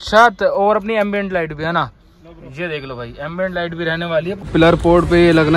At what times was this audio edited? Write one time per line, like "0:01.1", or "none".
0:04.5